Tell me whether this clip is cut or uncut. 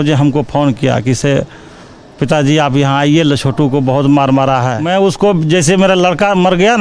cut